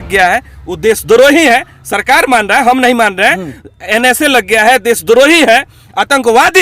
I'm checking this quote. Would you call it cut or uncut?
uncut